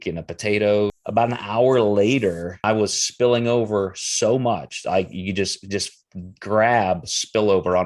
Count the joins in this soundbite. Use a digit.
2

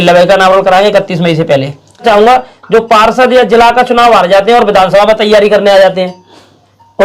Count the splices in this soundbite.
1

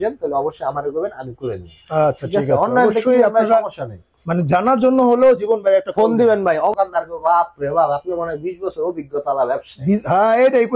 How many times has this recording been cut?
1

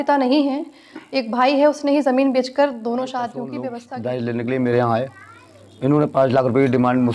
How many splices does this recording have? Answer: 1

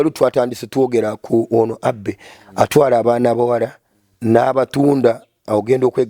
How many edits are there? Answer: 0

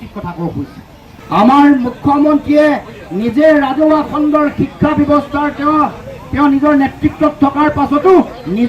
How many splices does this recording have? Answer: 1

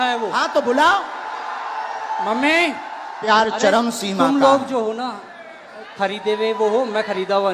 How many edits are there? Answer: 1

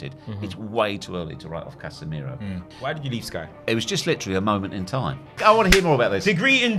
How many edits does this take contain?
2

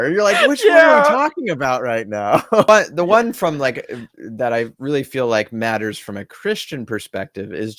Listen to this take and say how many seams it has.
1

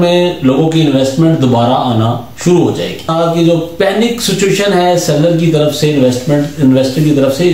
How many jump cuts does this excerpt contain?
1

